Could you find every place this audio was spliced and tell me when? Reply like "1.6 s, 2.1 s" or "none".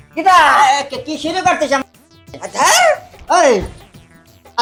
none